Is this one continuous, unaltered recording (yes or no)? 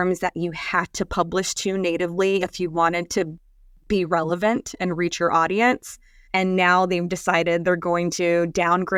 yes